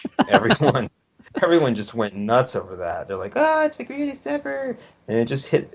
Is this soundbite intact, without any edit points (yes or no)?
no